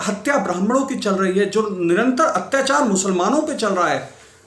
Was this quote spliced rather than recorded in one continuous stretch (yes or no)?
no